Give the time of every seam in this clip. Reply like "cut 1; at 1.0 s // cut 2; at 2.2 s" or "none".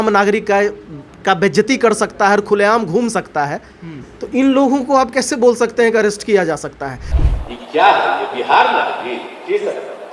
cut 1; at 7.1 s